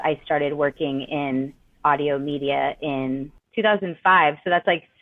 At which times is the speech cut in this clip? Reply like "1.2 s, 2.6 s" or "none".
3.4 s